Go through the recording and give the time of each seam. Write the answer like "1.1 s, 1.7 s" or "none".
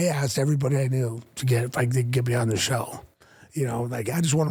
none